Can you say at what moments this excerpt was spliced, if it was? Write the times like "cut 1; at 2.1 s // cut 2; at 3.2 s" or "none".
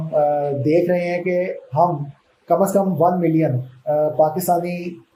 none